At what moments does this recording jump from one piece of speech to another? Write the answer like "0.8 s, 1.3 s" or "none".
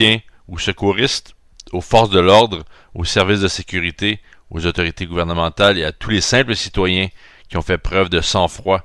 none